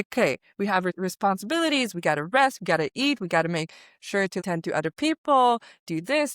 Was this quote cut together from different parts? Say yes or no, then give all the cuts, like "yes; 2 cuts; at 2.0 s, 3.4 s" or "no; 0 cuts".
yes; 2 cuts; at 1.0 s, 4.4 s